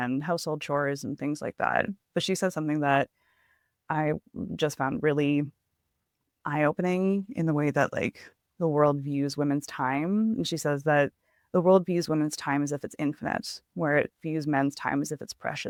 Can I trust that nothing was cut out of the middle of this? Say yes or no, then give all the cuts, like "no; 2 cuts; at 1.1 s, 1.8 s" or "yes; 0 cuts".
yes; 0 cuts